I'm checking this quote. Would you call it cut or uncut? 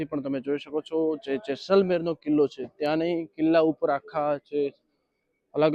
uncut